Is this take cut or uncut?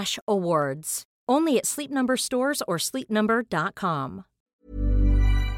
cut